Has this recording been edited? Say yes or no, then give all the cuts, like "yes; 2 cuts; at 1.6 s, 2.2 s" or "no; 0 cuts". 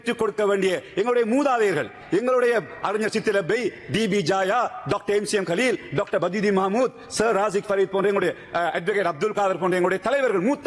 no; 0 cuts